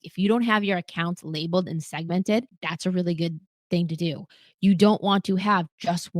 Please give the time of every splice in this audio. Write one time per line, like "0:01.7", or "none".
0:02.6